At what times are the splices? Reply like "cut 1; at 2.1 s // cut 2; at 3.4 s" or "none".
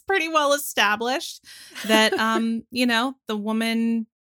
none